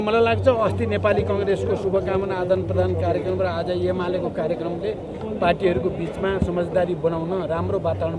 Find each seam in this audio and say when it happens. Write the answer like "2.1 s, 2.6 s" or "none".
none